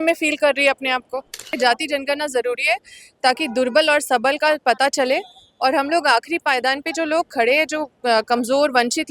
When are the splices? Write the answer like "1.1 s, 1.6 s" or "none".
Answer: 1.5 s